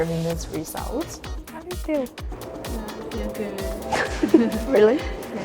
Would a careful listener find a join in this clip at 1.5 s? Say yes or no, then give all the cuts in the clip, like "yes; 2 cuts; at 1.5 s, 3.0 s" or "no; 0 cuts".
yes; 1 cut; at 1.5 s